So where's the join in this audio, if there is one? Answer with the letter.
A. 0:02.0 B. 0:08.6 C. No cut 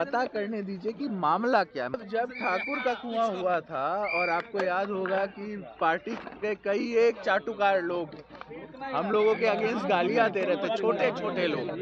A